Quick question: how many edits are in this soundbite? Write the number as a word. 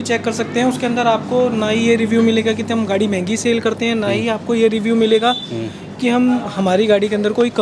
zero